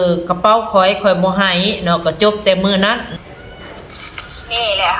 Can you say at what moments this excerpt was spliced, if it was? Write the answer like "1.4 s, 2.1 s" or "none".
3.1 s